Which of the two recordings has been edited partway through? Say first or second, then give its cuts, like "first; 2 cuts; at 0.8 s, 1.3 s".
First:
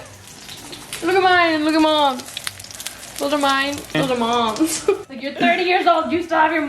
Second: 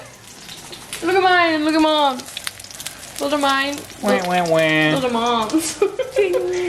first; 2 cuts; at 3.9 s, 5.1 s